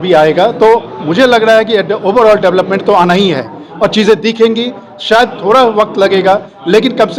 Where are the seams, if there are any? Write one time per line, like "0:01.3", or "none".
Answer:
none